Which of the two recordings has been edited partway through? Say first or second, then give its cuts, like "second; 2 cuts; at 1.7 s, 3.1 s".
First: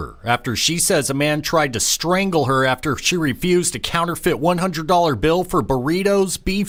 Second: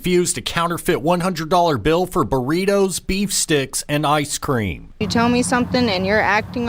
second; 1 cut; at 4.9 s